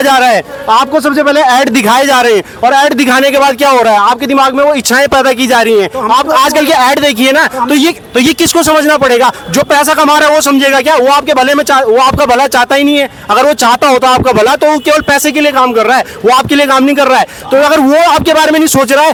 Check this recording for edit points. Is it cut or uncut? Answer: uncut